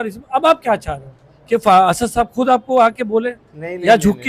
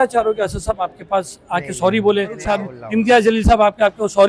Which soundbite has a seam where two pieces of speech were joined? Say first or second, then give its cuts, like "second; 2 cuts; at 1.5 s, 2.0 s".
second; 1 cut; at 2.5 s